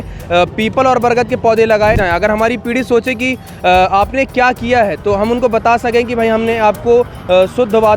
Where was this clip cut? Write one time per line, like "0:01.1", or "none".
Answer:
0:02.0

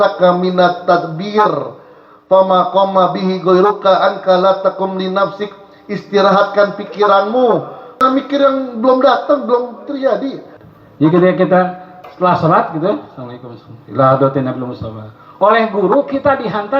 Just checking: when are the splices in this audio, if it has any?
0:08.0
0:10.5

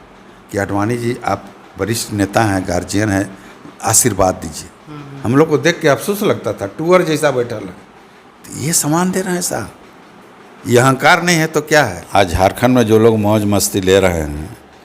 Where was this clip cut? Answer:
0:12.0

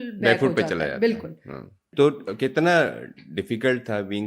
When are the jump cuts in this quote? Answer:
0:01.8

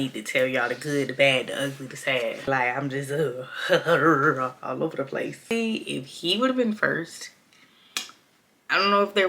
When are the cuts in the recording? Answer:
0:02.5
0:05.5

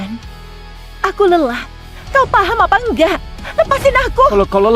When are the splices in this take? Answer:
none

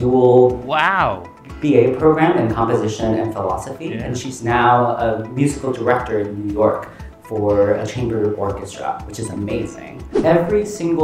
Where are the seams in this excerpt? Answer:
0:10.1

